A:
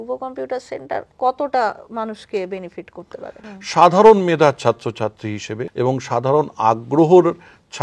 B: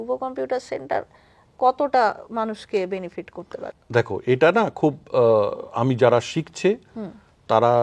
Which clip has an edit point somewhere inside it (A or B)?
A